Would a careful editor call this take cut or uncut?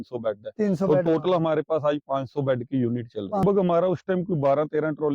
cut